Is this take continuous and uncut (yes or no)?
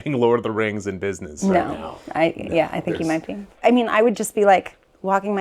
no